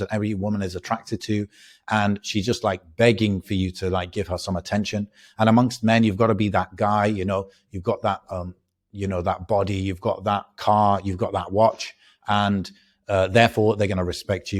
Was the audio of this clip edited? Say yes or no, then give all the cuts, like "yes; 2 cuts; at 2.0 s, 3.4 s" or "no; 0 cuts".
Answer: no; 0 cuts